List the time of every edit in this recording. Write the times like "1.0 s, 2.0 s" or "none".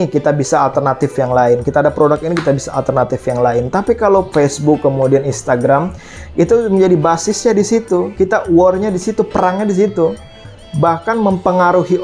none